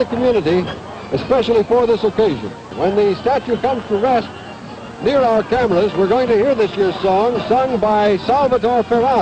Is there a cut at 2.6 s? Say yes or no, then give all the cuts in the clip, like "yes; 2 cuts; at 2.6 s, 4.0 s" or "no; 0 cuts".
yes; 1 cut; at 2.6 s